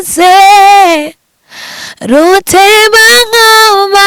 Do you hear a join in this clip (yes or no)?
no